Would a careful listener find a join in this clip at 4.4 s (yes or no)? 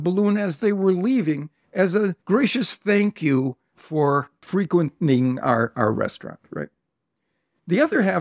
yes